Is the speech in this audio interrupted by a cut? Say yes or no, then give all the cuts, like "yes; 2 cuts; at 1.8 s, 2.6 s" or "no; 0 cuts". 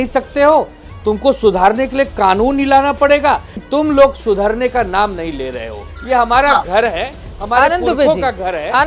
yes; 2 cuts; at 3.6 s, 5.9 s